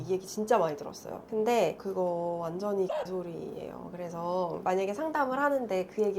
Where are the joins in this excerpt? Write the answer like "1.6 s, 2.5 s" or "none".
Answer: 1.1 s, 1.8 s